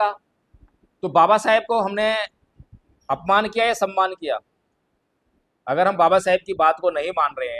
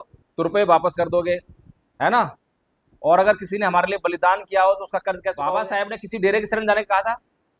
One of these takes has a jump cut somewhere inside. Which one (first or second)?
second